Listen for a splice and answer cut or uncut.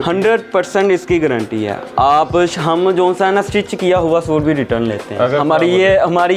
uncut